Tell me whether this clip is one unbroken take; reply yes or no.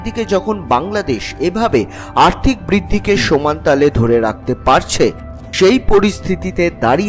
yes